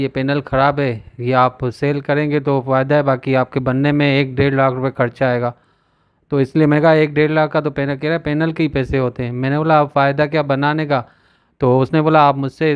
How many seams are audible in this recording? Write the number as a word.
zero